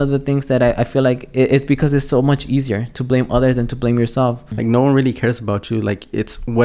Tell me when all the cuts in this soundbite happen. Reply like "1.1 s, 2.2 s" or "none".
4.5 s